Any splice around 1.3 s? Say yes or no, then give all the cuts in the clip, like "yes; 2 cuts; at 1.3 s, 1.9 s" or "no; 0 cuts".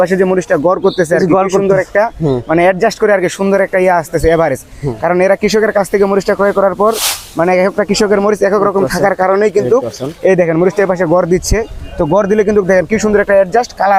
no; 0 cuts